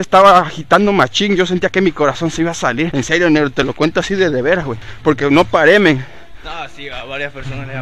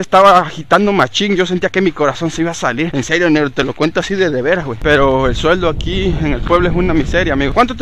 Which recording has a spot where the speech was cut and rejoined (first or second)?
second